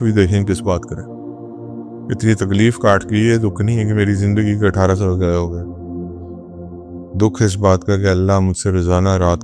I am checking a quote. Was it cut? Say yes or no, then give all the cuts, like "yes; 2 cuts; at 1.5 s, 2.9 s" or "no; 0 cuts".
yes; 2 cuts; at 5.5 s, 7.1 s